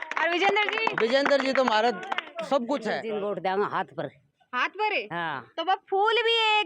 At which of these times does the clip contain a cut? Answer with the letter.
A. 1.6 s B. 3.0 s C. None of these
B